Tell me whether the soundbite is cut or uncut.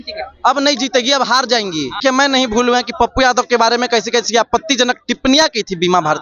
cut